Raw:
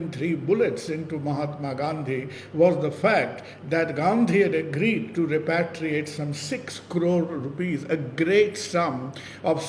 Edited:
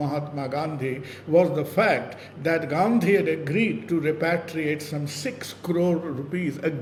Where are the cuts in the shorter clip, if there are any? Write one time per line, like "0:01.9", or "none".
none